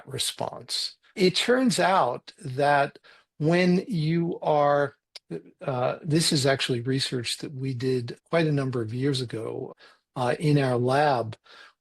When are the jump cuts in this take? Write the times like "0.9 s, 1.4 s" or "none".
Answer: 1.2 s, 3.1 s, 8.2 s, 9.7 s